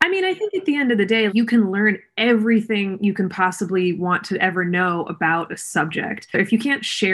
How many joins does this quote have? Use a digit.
2